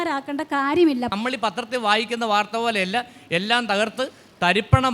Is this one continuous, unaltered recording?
no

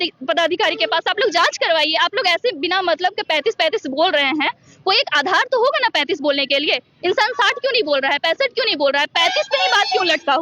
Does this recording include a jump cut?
no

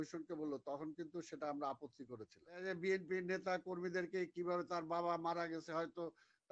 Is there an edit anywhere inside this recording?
yes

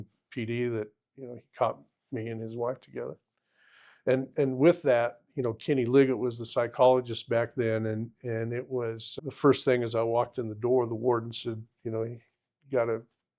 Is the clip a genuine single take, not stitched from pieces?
no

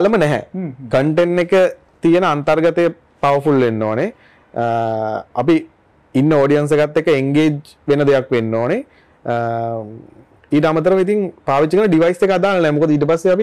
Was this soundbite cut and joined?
no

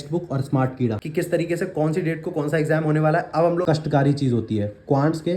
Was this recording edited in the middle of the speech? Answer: yes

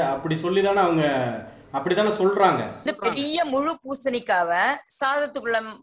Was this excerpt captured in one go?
yes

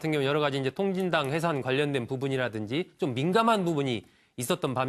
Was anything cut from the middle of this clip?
yes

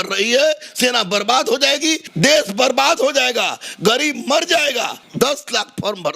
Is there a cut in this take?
yes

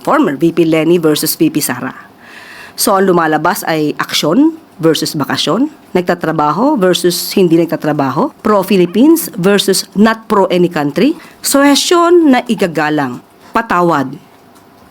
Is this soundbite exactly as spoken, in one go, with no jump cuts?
no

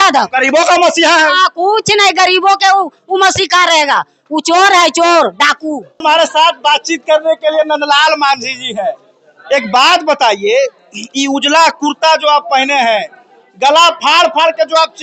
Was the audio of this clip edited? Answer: no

